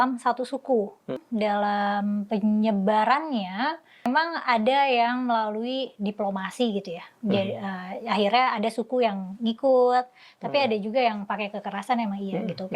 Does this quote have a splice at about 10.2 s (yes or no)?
no